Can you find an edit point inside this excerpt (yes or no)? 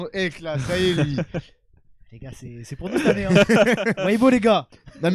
no